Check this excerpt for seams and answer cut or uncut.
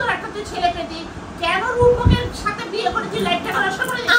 uncut